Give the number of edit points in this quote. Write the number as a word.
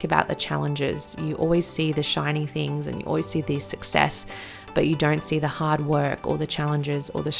zero